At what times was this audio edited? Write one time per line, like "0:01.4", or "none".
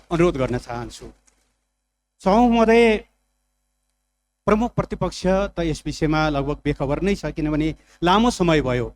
none